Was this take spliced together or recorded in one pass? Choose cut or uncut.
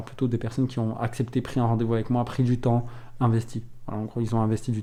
uncut